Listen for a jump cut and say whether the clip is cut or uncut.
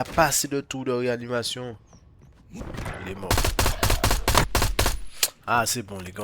cut